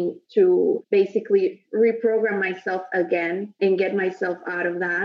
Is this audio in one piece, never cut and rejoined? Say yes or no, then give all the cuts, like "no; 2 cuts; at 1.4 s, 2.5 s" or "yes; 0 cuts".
no; 1 cut; at 3.6 s